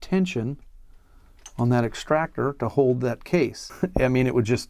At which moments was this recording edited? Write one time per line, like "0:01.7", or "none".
0:03.6

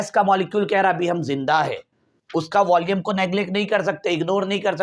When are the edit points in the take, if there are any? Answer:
none

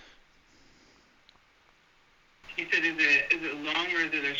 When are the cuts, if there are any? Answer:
none

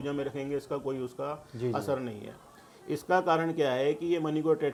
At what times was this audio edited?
none

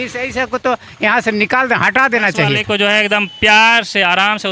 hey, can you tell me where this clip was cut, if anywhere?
0:02.6

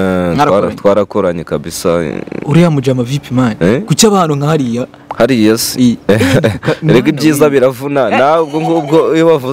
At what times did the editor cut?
none

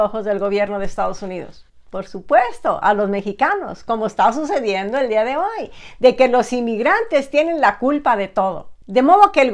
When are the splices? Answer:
none

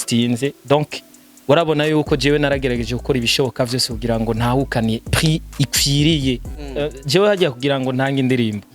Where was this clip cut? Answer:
0:06.6

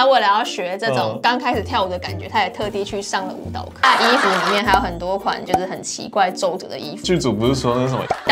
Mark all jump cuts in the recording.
0:03.8
0:07.0

